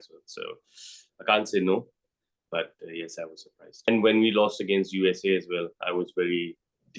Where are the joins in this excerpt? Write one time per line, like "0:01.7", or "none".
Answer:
0:03.9